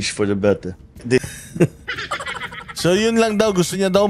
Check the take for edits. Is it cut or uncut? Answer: cut